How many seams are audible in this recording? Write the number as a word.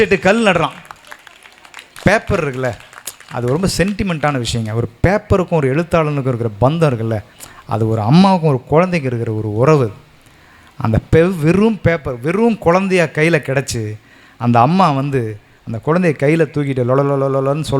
one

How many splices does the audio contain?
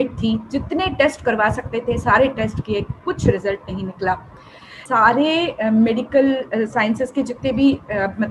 one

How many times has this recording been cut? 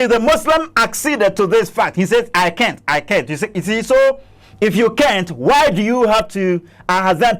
zero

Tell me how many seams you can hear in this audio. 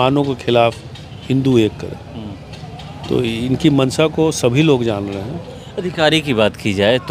zero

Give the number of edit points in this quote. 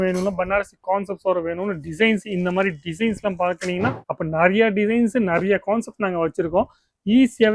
one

